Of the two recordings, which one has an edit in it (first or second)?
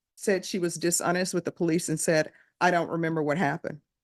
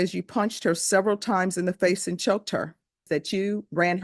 second